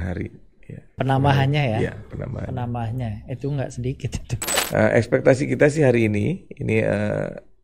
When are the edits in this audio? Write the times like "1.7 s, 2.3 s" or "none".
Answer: 0.9 s, 4.6 s